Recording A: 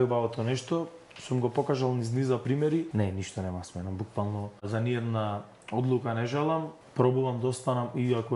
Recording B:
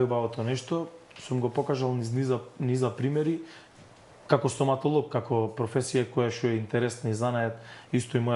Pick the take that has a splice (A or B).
A